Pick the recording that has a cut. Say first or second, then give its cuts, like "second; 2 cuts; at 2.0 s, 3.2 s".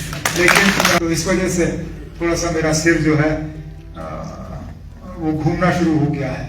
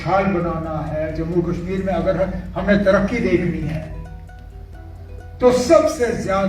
first; 1 cut; at 1.0 s